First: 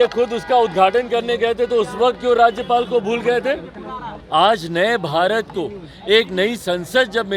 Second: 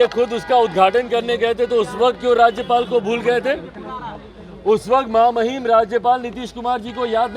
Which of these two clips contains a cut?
first; 1 cut; at 4.1 s

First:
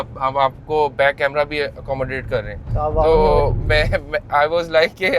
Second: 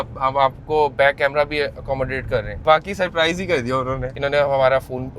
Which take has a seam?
second; 2 cuts; at 2.6 s, 4.1 s

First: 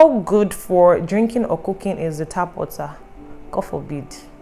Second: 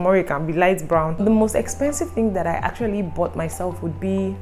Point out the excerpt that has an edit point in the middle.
second; 1 cut; at 1.2 s

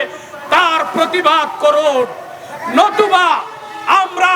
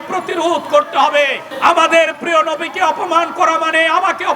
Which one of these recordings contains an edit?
second; 1 cut; at 1.4 s

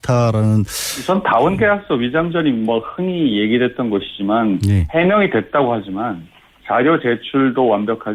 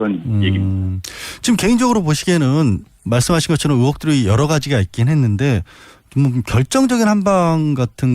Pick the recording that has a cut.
second; 1 cut; at 4.0 s

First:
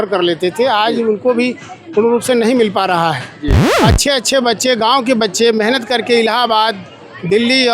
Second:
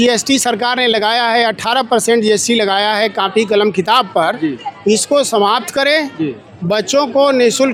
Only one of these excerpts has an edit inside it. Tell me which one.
first; 1 cut; at 3.7 s

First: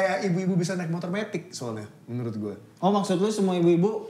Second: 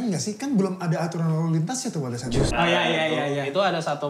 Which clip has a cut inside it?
second; 1 cut; at 2.5 s

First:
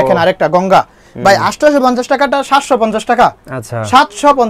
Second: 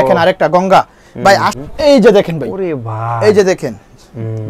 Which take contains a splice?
second; 1 cut; at 1.5 s

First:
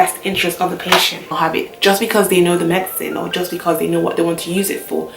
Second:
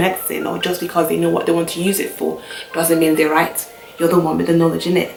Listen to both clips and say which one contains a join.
first; 1 cut; at 1.3 s

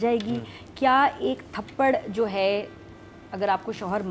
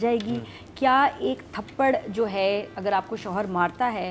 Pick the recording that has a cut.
second; 1 cut; at 2.7 s

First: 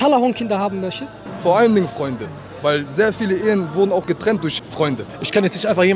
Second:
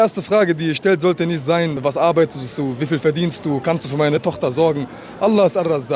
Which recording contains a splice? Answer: first; 2 cuts; at 1.2 s, 4.7 s

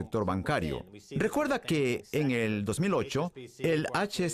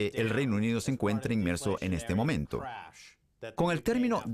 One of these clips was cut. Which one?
second; 1 cut; at 2.8 s

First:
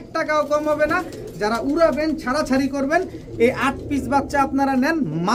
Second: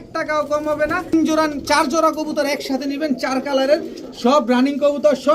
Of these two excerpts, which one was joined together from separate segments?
second; 1 cut; at 1.1 s

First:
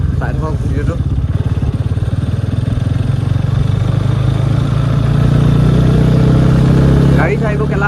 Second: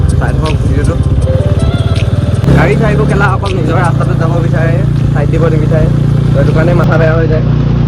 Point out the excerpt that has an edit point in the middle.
second; 1 cut; at 2.5 s

